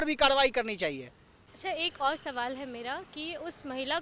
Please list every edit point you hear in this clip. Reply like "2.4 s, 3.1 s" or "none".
none

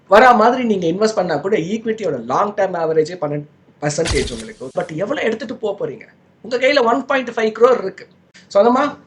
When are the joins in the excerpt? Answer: 4.7 s

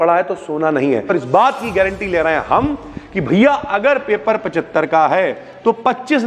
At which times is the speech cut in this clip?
1.1 s

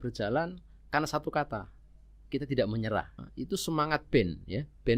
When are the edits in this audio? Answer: 3.2 s

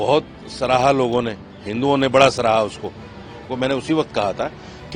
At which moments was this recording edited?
3.5 s

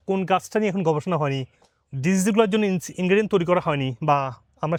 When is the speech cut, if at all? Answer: none

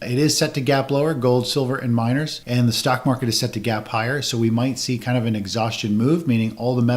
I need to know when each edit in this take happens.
2.4 s

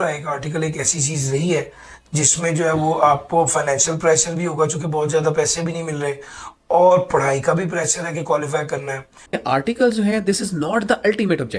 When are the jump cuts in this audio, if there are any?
9.1 s

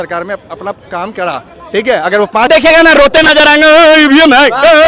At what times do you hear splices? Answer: 2.5 s

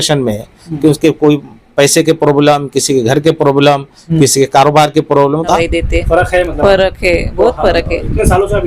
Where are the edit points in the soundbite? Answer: 5.5 s

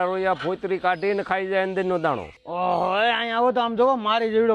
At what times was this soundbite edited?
2.3 s

